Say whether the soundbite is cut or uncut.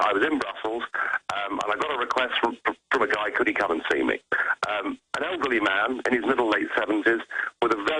uncut